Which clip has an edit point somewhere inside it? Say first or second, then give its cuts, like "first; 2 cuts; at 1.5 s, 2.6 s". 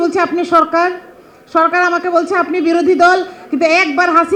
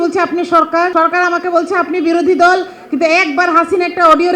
second; 1 cut; at 0.9 s